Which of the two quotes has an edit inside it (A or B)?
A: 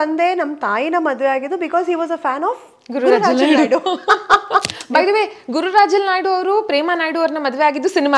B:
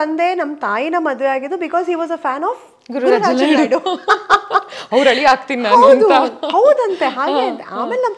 A